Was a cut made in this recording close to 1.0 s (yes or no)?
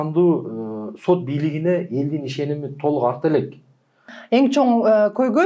no